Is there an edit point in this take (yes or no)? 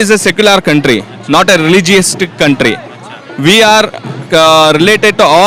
no